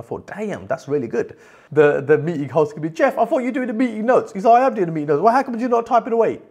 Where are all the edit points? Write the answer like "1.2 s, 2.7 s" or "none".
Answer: 1.6 s